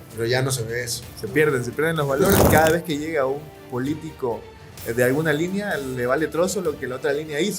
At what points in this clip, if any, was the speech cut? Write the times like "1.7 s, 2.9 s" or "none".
2.4 s